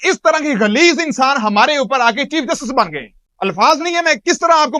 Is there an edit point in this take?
no; 0 cuts

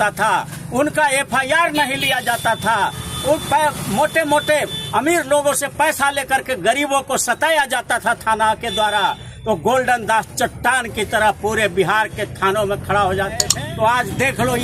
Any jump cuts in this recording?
yes; 1 cut; at 13.5 s

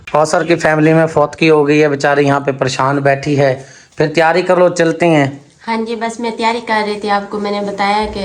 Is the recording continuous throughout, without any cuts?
yes; 0 cuts

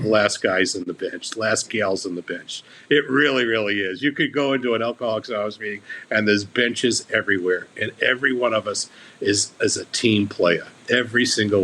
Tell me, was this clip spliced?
yes; 1 cut; at 10.7 s

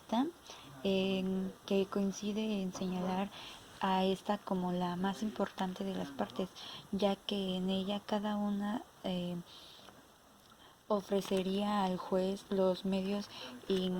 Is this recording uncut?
yes; 0 cuts

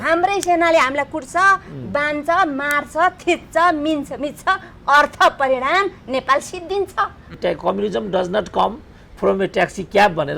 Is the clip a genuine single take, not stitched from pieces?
no; 1 cut; at 7.3 s

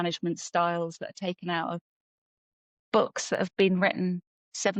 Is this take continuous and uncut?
yes; 0 cuts

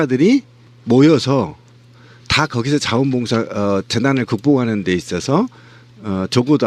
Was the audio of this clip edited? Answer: no; 0 cuts

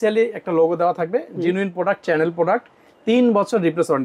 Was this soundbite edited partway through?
no; 0 cuts

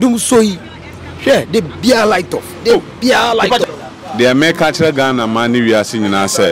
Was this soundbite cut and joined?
yes; 1 cut; at 3.6 s

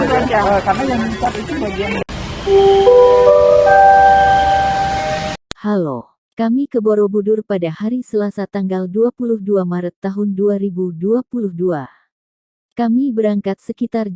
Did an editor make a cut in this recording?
yes; 1 cut; at 2.1 s

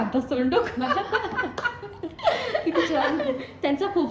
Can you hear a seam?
no; 0 cuts

